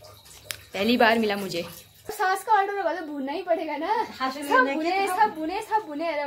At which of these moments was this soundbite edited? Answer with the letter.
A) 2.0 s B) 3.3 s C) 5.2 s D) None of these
A